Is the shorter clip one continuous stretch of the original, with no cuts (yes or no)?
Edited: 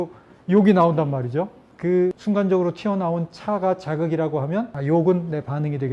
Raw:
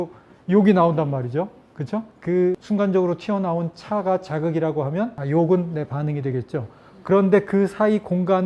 no